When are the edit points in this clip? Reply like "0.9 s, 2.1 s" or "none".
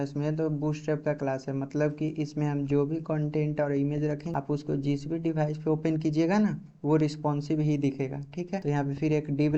4.3 s, 8.6 s